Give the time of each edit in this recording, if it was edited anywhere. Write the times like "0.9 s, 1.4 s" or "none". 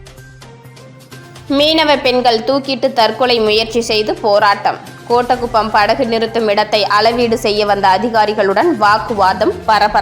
0.9 s